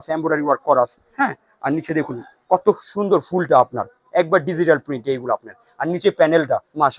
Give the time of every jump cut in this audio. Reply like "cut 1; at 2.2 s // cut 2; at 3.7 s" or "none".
none